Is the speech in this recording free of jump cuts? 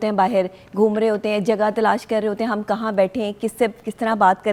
yes; 0 cuts

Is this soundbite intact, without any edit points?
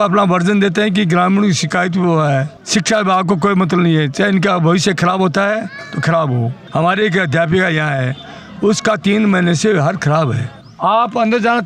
no; 3 cuts; at 2.6 s, 6.6 s, 10.6 s

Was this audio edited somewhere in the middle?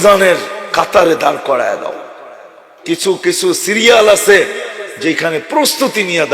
yes; 1 cut; at 2.7 s

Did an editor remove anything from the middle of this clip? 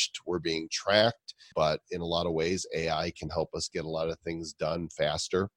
yes; 1 cut; at 1.4 s

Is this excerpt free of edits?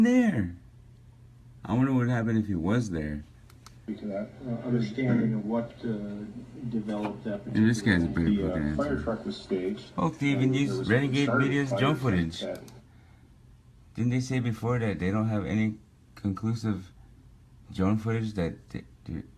yes; 0 cuts

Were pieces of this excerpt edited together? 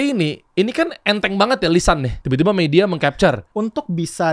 yes; 2 cuts; at 2.2 s, 3.5 s

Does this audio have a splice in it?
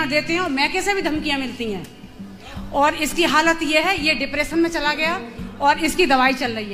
no; 0 cuts

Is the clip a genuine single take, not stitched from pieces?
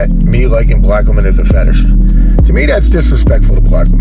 yes; 0 cuts

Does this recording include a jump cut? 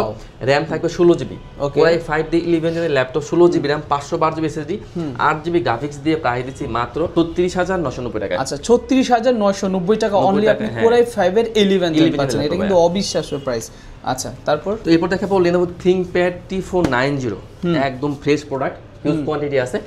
no; 0 cuts

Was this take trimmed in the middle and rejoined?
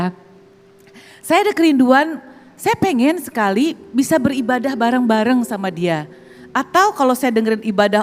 no; 0 cuts

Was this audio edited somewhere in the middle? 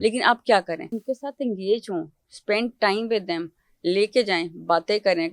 yes; 1 cut; at 1.0 s

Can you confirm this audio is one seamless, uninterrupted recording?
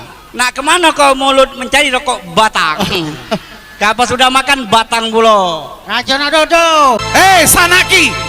no; 1 cut; at 7.0 s

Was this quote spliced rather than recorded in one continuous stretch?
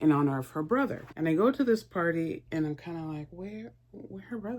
yes; 1 cut; at 1.1 s

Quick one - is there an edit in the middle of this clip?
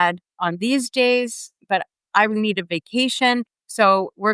no; 0 cuts

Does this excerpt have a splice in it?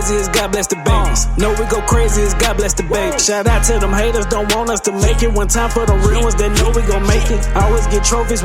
no; 0 cuts

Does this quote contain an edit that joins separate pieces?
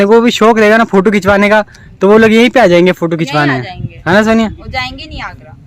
no; 0 cuts

